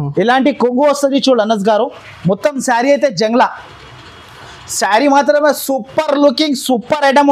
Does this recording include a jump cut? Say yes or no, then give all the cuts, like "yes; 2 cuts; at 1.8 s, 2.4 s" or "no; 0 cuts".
no; 0 cuts